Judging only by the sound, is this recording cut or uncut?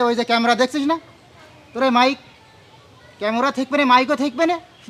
uncut